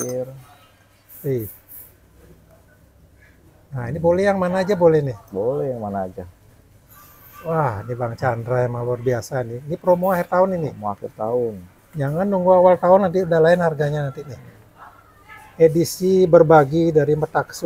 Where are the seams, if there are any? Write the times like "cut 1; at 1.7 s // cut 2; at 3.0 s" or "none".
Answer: none